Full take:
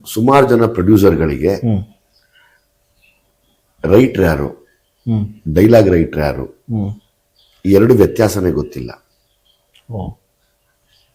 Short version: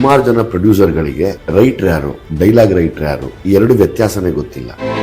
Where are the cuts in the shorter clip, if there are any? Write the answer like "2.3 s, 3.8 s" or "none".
1.4 s, 2.2 s, 3.3 s